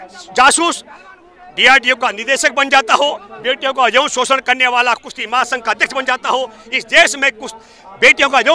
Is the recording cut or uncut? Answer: uncut